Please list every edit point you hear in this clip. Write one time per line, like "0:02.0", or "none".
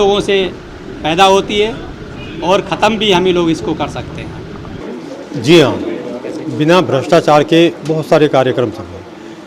0:04.8